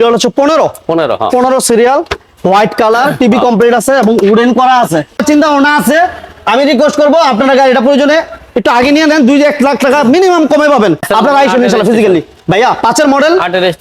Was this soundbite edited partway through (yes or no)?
yes